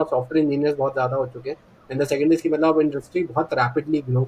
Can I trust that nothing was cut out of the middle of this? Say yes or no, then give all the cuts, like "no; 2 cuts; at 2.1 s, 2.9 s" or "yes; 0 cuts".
yes; 0 cuts